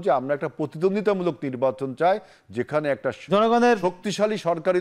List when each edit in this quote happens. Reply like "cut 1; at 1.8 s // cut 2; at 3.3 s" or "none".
none